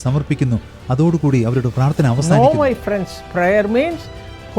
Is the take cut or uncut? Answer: cut